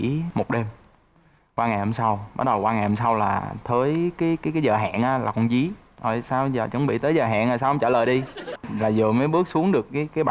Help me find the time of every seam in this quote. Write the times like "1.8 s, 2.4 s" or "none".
8.6 s